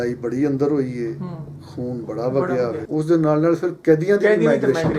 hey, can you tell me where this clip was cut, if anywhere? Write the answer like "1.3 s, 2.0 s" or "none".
2.8 s